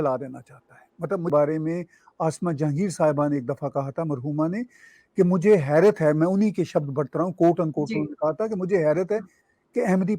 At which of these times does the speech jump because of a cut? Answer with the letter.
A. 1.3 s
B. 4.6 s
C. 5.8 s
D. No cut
A